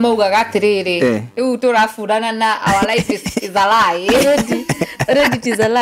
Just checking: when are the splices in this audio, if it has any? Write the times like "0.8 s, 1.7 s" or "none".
none